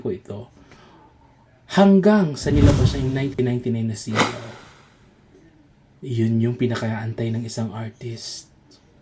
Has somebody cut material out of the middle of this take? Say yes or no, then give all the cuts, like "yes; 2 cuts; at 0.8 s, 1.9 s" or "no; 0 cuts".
no; 0 cuts